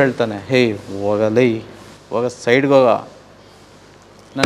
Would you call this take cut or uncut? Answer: uncut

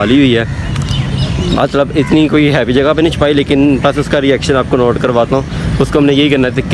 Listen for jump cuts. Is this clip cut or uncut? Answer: uncut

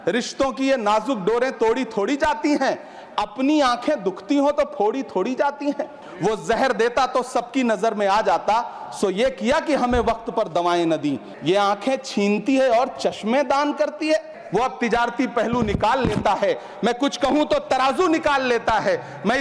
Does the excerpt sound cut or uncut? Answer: cut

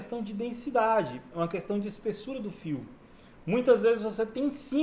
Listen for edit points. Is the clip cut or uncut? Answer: uncut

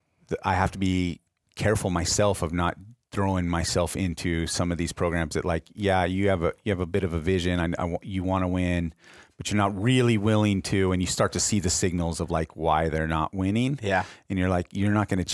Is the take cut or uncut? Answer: uncut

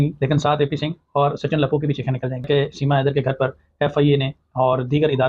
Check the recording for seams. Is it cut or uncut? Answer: cut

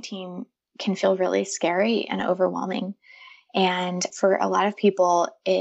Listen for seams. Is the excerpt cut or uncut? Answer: cut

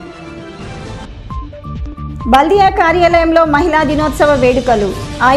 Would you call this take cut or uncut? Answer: uncut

